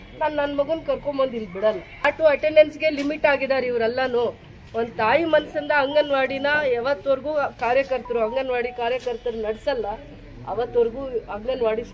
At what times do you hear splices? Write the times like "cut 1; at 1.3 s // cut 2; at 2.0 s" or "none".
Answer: cut 1; at 2.0 s